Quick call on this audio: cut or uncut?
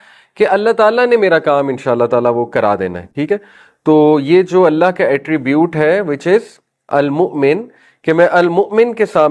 uncut